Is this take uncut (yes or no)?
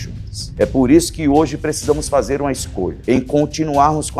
no